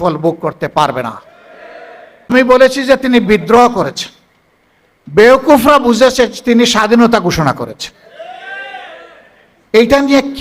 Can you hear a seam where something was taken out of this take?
yes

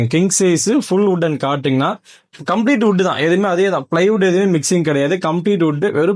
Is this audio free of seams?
yes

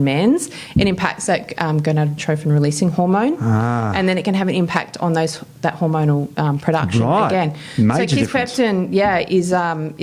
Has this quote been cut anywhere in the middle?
no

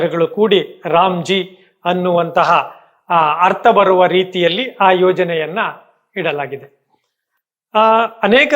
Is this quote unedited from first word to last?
yes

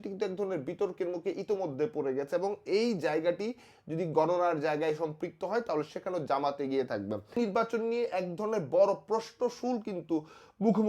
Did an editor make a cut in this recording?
yes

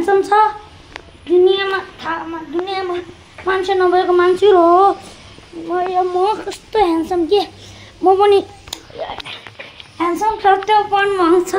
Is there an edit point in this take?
no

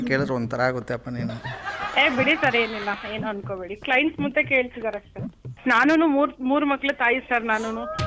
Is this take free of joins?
no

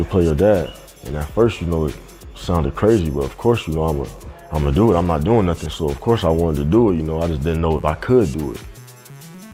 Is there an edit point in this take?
no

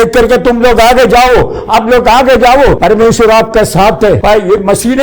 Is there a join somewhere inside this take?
yes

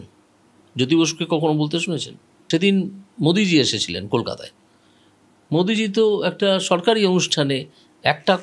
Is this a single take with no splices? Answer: no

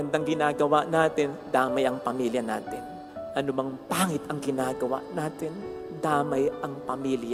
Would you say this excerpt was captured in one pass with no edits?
yes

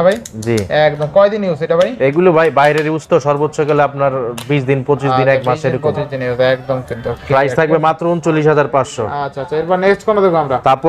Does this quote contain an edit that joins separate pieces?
no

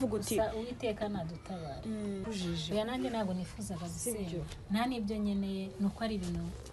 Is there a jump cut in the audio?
yes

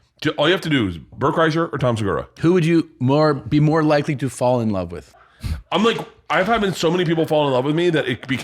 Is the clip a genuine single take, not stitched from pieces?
no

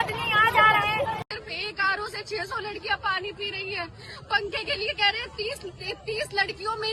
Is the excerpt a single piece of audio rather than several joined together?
no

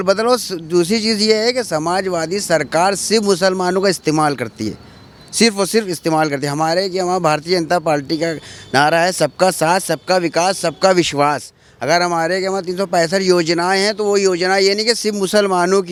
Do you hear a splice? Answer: no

